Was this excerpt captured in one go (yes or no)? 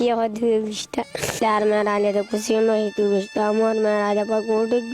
no